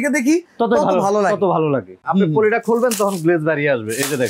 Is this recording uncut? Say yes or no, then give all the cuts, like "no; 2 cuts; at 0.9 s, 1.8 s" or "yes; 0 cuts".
no; 1 cut; at 1.9 s